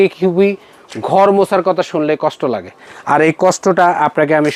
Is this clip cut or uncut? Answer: uncut